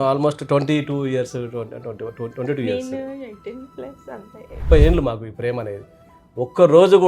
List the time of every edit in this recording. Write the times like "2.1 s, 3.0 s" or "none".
4.6 s